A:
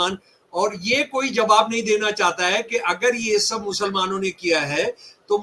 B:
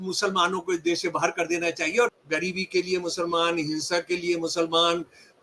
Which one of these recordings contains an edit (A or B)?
B